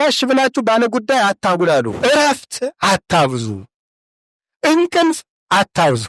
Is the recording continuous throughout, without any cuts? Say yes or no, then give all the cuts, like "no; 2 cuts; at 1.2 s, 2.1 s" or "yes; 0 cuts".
no; 1 cut; at 1.9 s